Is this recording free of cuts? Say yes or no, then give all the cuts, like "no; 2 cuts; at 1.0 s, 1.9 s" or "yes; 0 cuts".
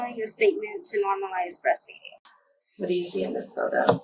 no; 1 cut; at 2.2 s